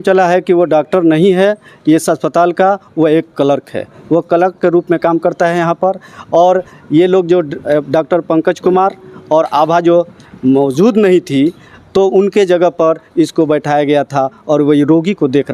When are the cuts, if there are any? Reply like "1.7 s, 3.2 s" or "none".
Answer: none